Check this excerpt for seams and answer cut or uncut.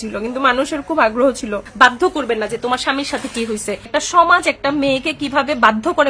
cut